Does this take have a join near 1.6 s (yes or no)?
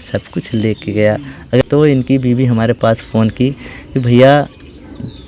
yes